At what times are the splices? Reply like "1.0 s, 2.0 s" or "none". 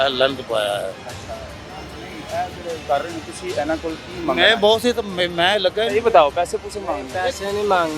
none